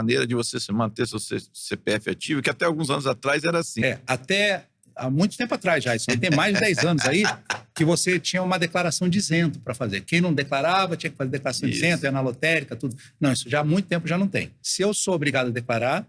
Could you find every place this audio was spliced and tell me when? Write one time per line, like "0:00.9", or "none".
0:03.8
0:14.6